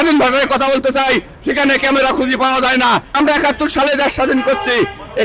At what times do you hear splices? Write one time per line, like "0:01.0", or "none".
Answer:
0:03.1

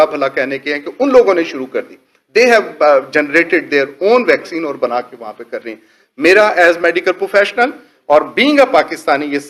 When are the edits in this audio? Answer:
none

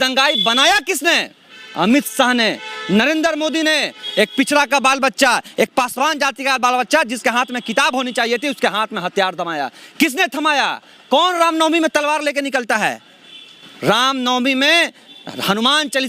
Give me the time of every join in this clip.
none

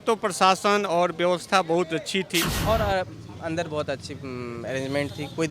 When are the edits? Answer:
0:02.5

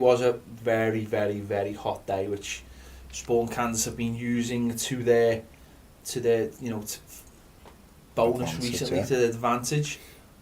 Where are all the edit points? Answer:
0:07.2

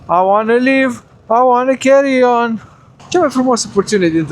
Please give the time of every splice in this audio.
0:02.9

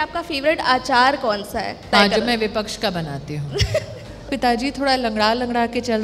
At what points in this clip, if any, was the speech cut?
0:01.9
0:04.2

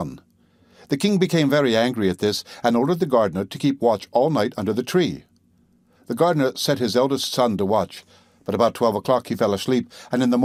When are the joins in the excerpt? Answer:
none

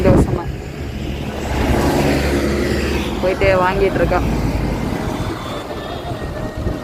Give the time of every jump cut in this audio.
none

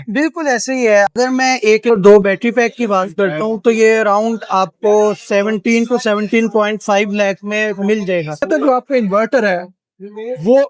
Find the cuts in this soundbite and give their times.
0:01.1
0:08.5

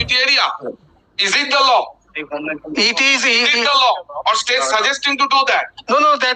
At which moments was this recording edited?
none

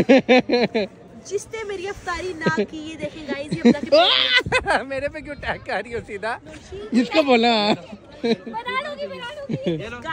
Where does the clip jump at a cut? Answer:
none

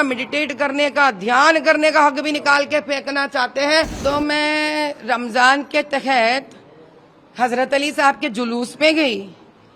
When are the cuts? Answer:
0:03.9

